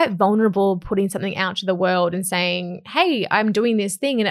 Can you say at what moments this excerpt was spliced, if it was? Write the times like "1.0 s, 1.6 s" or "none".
none